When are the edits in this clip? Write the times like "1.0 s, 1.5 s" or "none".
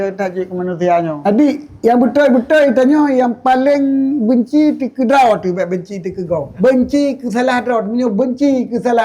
1.2 s, 6.5 s